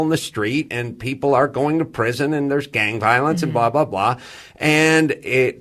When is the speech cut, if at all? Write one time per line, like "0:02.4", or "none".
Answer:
0:01.2